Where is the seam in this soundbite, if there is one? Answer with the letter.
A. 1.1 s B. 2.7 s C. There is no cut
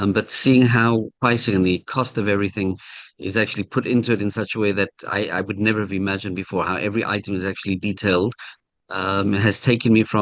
A